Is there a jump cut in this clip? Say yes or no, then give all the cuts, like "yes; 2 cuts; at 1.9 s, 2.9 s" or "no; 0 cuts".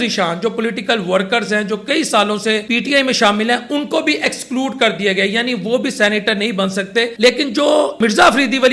yes; 3 cuts; at 2.6 s, 7.1 s, 8.0 s